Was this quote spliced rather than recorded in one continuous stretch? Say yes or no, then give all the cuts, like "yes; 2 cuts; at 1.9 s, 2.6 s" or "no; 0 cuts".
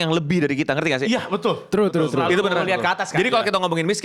no; 0 cuts